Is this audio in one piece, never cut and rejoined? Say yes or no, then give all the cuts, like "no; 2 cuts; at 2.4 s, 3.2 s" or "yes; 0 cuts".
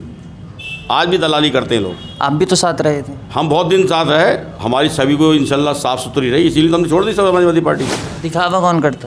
no; 1 cut; at 8.1 s